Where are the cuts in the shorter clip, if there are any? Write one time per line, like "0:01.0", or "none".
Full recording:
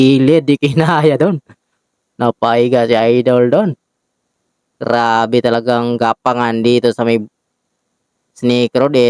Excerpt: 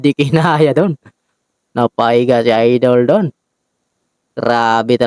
none